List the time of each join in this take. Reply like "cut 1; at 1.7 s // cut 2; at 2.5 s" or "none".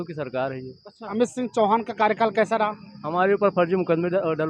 cut 1; at 1.1 s